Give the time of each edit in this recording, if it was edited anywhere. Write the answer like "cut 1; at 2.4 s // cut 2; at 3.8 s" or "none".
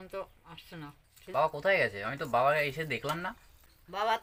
none